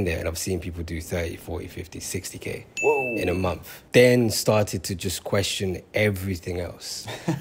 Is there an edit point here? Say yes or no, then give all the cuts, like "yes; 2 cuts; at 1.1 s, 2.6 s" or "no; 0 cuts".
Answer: no; 0 cuts